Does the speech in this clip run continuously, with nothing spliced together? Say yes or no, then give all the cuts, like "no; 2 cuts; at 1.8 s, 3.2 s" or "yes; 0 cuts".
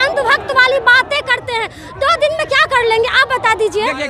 yes; 0 cuts